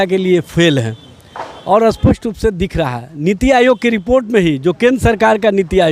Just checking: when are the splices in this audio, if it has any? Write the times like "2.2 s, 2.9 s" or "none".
none